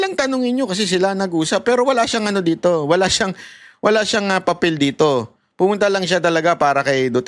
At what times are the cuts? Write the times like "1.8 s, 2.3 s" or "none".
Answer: none